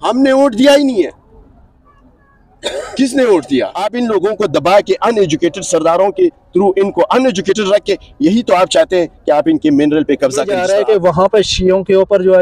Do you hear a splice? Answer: yes; 2 cuts; at 3.8 s, 10.6 s

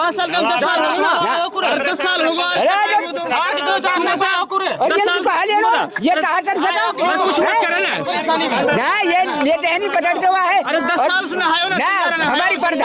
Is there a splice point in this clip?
no; 0 cuts

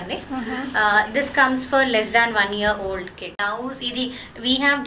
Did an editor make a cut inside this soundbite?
yes; 1 cut; at 3.4 s

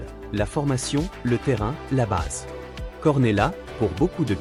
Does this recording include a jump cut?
no; 0 cuts

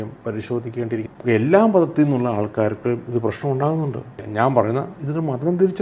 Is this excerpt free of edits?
no; 1 cut; at 1.1 s

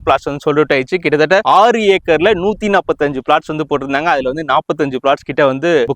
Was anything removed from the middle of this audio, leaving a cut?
no; 0 cuts

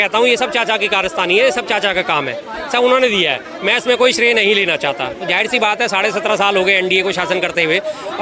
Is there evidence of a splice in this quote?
no; 0 cuts

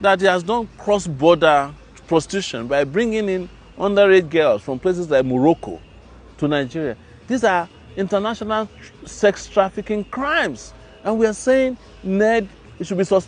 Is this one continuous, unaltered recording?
yes; 0 cuts

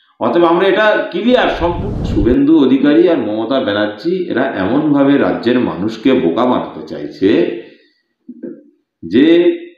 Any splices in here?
yes; 1 cut; at 1.9 s

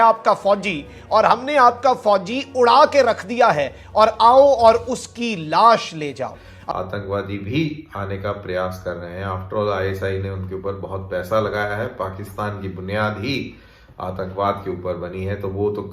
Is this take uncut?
no; 1 cut; at 6.3 s

